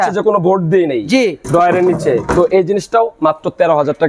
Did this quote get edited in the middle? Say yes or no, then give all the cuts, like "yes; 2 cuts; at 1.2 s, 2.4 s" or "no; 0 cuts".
no; 0 cuts